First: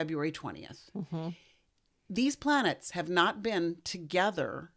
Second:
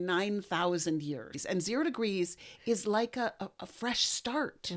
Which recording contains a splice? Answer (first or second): second